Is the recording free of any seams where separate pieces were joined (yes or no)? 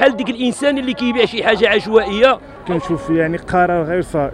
no